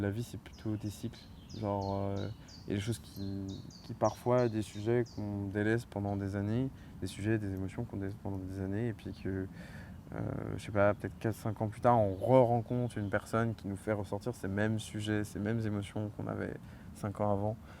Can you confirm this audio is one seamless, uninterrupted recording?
yes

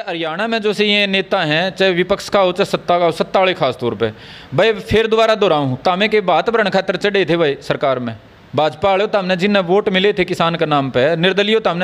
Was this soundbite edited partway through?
no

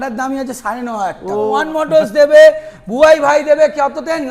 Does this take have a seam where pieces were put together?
yes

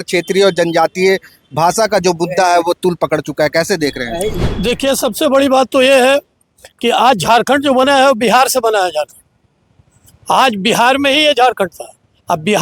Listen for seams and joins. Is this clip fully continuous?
yes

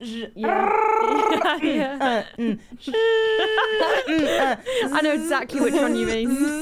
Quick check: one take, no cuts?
yes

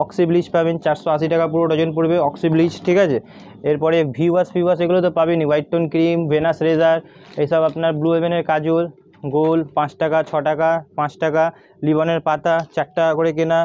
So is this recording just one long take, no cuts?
yes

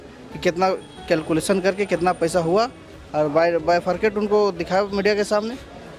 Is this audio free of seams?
yes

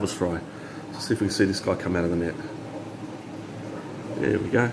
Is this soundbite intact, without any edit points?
yes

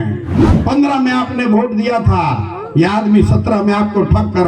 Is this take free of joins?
yes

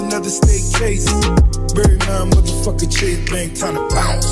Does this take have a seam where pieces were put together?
no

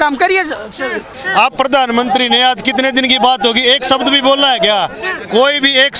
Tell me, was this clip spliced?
yes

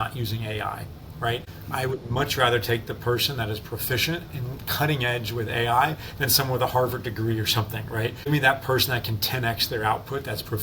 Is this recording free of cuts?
no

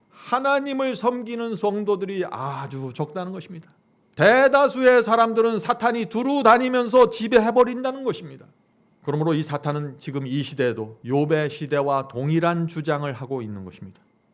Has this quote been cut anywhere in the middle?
yes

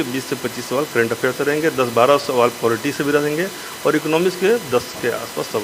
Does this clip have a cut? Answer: no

